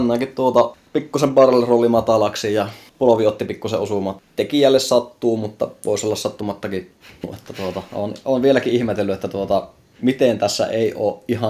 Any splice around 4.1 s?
yes; 3 cuts; at 2.8 s, 4.1 s, 7.4 s

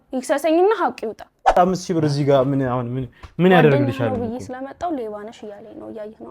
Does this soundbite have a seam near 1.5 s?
yes; 1 cut; at 1.5 s

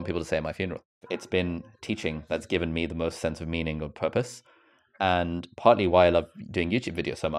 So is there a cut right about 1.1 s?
yes; 1 cut; at 1.1 s

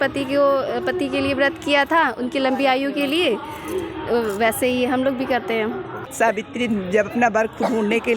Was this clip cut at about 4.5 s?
no; 1 cut; at 6.1 s

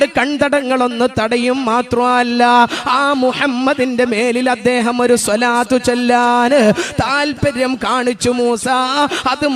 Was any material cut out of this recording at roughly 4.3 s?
no; 0 cuts

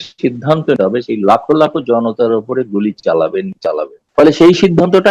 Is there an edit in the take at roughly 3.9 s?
yes; 1 cut; at 3.9 s

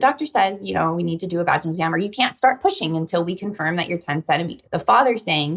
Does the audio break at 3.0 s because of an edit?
no; 1 cut; at 4.6 s

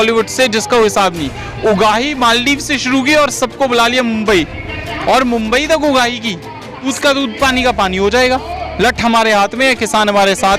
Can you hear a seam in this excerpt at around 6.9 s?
yes; 1 cut; at 6.9 s

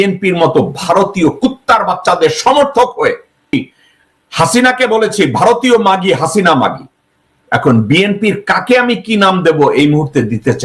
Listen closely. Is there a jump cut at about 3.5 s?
yes; 1 cut; at 3.5 s

